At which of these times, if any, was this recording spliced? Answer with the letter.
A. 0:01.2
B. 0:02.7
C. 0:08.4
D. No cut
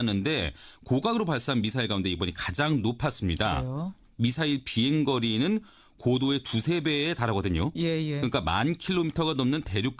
B